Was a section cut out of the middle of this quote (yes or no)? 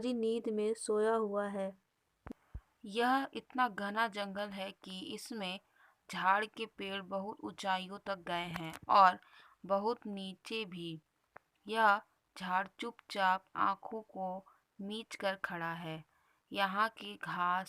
yes